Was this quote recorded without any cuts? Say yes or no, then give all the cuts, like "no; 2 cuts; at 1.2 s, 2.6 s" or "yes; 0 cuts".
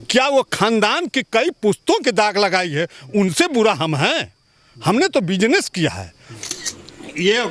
no; 1 cut; at 6.5 s